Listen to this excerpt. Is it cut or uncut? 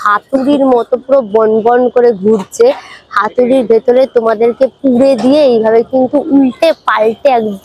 uncut